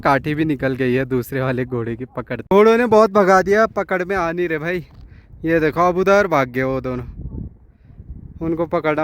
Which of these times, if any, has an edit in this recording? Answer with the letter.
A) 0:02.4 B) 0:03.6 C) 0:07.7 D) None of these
A